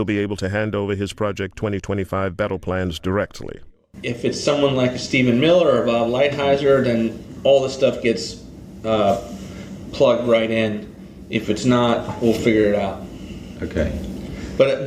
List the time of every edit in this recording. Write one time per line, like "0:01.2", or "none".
none